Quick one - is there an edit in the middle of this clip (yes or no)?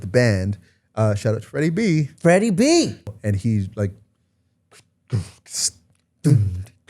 yes